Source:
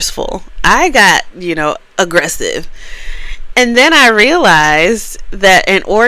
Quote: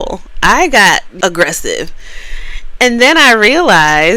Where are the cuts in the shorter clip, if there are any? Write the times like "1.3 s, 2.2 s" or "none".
1.1 s

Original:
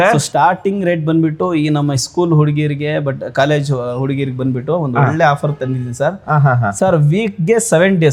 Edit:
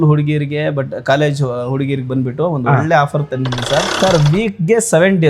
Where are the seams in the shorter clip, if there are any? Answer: 3.9 s

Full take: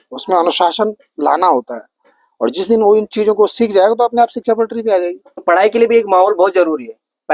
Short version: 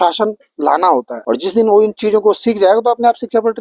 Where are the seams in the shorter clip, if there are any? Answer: 1.1 s

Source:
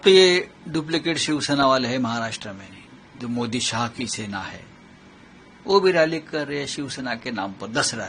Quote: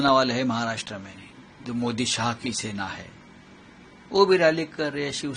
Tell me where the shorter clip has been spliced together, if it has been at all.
none

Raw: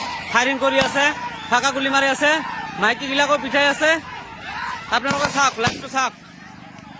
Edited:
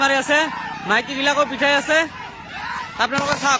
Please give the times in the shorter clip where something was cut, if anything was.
none

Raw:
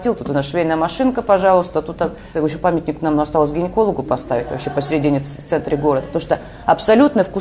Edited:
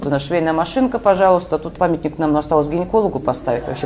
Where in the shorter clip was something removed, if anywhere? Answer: 1.7 s

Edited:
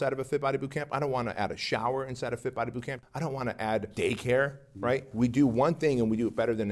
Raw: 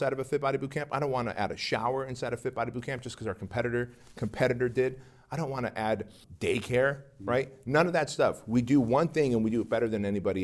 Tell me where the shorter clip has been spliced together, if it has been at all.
3.0 s, 3.9 s, 5.1 s

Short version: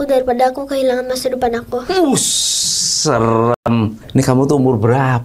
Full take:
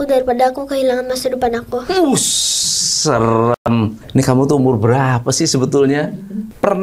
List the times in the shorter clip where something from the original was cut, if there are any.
none

